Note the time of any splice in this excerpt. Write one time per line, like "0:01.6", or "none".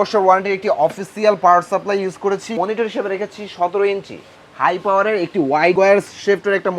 0:02.6
0:05.7